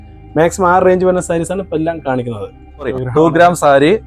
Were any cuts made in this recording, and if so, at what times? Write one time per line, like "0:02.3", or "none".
0:03.0